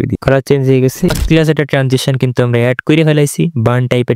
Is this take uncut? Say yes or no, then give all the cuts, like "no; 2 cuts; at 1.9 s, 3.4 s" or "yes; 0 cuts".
no; 1 cut; at 1.1 s